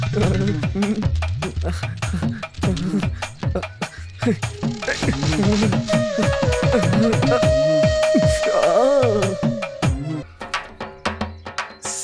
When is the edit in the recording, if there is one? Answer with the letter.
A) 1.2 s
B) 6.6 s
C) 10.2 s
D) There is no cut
C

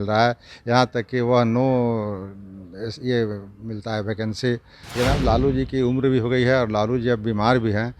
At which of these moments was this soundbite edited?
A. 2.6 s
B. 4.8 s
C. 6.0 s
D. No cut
B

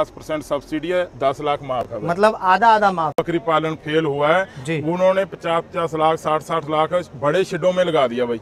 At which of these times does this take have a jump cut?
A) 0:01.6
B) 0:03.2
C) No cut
B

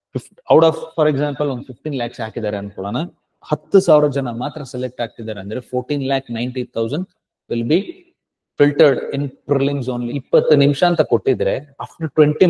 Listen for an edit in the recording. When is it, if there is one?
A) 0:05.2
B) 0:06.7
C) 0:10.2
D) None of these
C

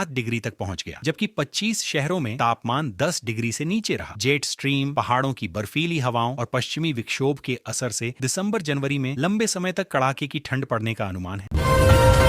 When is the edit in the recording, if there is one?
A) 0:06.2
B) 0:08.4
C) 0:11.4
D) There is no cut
C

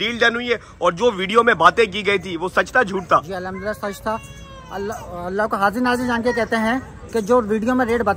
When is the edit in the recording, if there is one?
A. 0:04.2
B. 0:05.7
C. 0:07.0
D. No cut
D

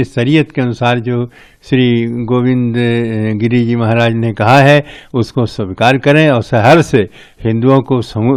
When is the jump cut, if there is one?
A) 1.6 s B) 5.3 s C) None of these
C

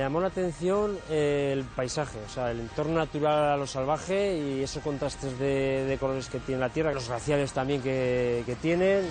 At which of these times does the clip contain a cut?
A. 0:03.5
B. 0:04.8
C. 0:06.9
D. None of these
C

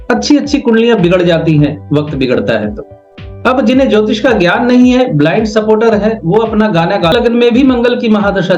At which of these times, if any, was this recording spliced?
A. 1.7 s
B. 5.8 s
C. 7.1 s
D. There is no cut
C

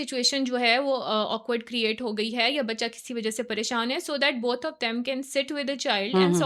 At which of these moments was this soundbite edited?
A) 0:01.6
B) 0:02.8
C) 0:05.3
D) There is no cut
D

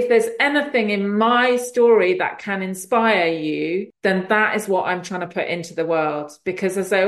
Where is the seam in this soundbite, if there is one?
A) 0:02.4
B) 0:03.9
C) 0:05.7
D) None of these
B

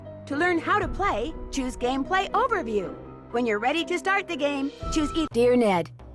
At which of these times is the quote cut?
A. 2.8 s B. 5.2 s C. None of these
B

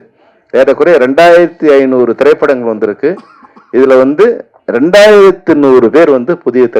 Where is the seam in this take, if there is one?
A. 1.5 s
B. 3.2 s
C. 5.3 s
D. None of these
D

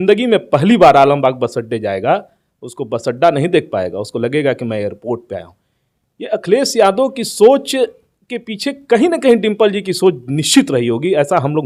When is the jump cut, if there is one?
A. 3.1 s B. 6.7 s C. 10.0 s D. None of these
D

